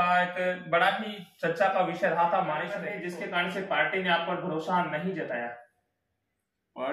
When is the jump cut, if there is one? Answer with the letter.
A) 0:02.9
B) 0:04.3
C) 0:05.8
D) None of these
A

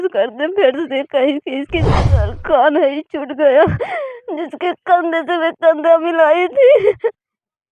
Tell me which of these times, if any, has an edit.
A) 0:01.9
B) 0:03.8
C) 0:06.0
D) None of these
A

